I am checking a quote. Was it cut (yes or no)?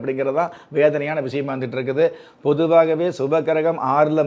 no